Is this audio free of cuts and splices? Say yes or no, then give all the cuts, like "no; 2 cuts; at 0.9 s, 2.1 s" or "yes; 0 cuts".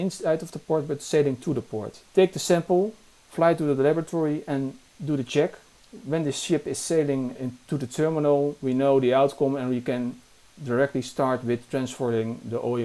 yes; 0 cuts